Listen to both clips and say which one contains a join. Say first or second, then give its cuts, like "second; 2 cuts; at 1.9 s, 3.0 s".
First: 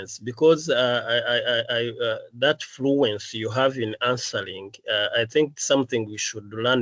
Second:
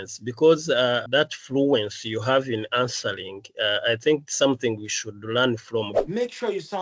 second; 2 cuts; at 1.0 s, 6.0 s